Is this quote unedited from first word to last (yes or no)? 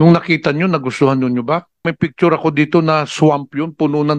no